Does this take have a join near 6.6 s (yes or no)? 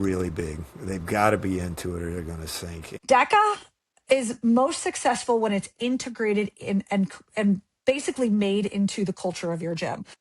no